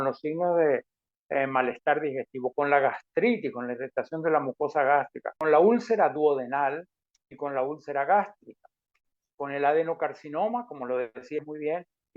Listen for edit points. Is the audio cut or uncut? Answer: cut